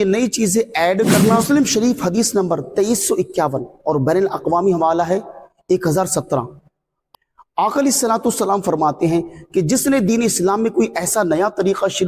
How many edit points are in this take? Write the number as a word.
one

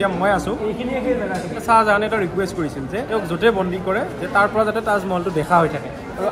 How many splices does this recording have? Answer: two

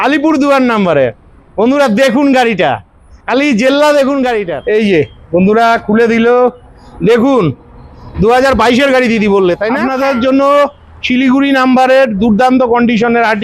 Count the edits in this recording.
two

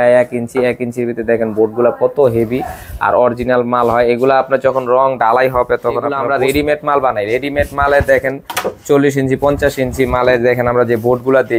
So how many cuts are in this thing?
one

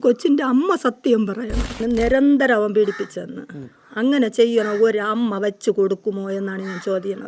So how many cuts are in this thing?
one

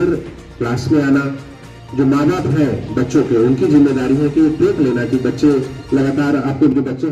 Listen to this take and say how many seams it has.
zero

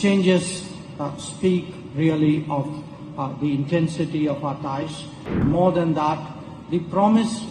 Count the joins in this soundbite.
one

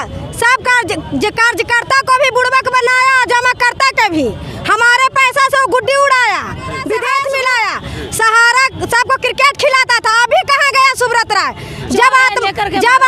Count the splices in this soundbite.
one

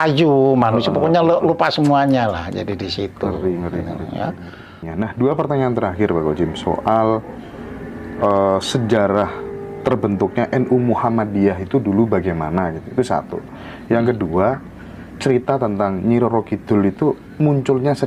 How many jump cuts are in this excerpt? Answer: one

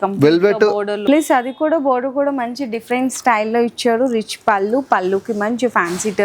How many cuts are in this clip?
one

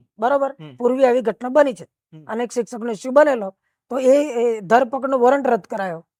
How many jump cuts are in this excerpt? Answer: zero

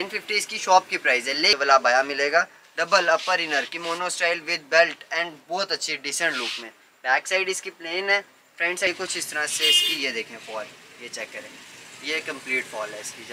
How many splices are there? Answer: two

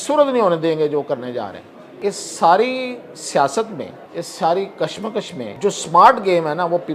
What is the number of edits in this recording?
three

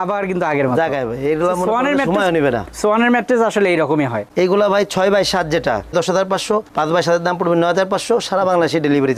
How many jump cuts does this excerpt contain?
zero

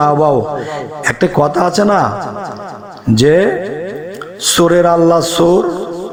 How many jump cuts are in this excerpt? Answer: zero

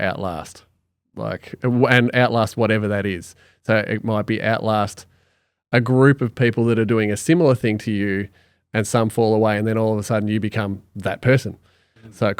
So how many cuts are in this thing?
zero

